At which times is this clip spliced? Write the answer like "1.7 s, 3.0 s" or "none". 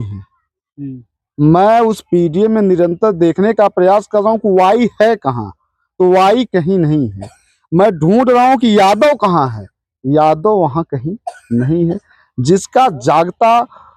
none